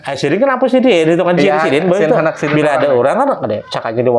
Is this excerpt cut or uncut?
uncut